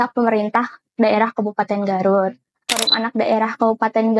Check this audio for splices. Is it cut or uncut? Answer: cut